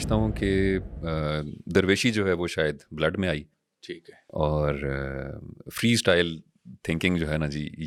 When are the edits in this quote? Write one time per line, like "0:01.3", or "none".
none